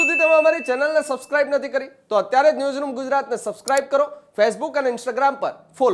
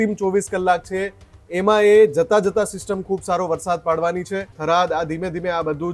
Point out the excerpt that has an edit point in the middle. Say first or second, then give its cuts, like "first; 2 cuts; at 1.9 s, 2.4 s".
second; 1 cut; at 4.5 s